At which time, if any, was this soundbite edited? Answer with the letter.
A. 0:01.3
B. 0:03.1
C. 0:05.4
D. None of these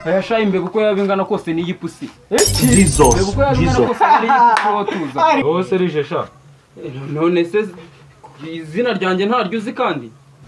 C